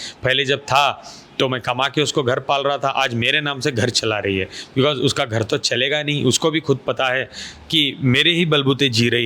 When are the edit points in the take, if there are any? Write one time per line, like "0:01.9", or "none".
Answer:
none